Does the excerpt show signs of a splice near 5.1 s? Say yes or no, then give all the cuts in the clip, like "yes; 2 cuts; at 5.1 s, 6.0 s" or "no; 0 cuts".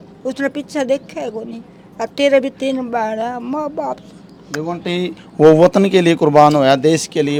no; 0 cuts